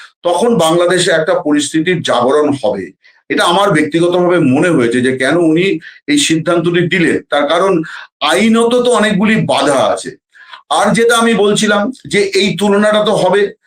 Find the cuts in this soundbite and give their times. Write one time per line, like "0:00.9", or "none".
none